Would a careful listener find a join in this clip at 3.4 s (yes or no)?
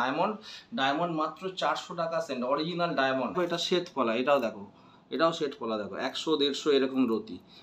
yes